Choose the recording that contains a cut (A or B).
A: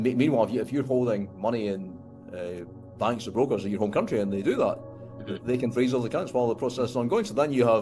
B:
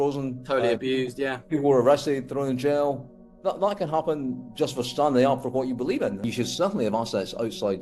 B